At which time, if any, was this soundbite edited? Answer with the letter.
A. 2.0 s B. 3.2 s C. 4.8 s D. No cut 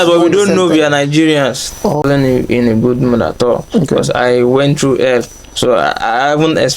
A